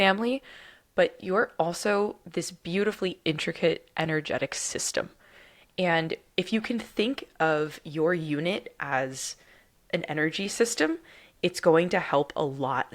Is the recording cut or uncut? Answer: uncut